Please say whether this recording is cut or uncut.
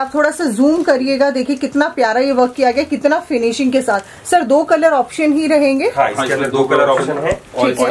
uncut